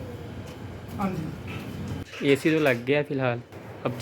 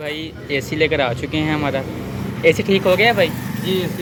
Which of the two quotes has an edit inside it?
first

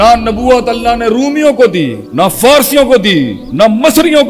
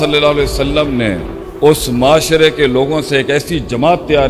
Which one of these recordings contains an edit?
first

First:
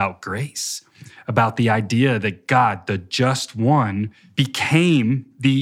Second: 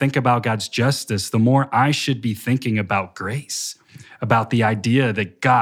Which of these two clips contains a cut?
first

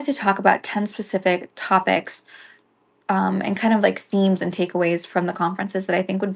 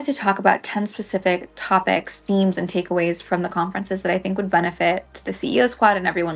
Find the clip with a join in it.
second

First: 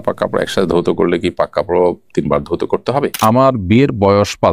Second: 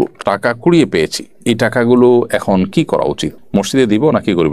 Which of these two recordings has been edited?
first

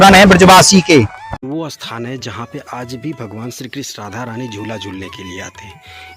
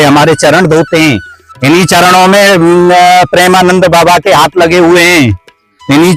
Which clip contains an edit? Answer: first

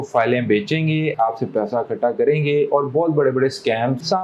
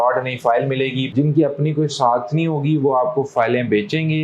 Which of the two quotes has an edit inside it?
second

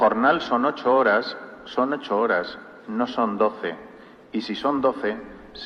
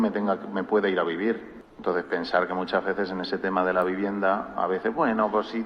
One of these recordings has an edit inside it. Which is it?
second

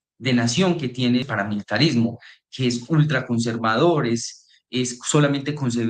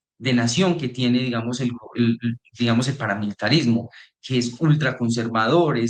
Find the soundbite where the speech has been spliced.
first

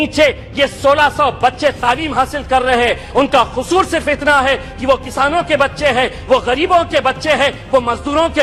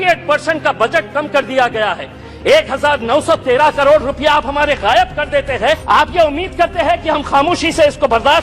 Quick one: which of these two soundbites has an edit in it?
second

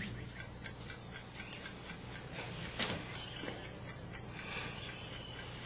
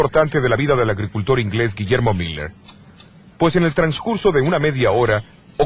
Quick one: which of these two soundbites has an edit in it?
second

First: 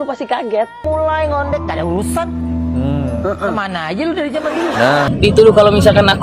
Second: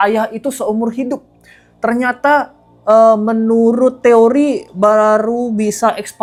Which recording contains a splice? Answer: first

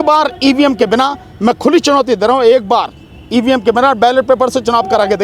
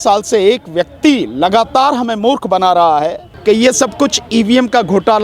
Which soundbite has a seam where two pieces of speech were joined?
second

